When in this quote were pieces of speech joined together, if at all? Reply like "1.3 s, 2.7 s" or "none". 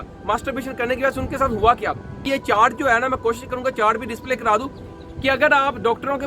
2.2 s